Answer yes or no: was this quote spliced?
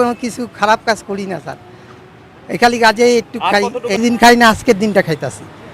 yes